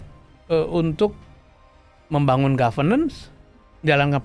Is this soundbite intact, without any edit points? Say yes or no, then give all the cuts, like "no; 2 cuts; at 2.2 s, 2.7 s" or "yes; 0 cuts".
yes; 0 cuts